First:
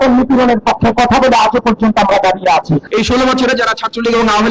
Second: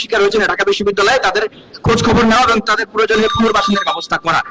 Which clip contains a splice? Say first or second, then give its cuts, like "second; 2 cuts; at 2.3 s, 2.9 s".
first; 1 cut; at 2.8 s